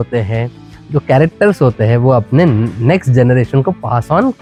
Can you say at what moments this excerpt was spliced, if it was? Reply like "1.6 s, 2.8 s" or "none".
none